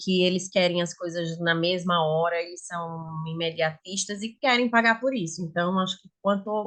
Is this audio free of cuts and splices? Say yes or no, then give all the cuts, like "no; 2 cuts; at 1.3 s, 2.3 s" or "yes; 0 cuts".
yes; 0 cuts